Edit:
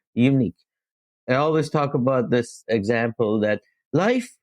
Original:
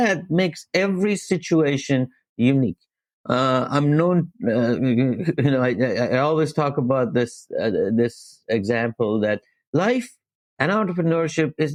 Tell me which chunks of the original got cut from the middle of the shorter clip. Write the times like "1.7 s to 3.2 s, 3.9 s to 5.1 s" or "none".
3.3 s to 5.9 s, 7.4 s to 8.4 s